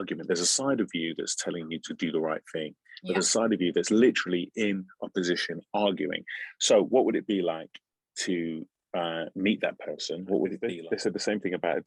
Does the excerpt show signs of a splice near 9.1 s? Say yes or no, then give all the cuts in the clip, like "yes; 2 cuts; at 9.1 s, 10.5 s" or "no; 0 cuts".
no; 1 cut; at 10.7 s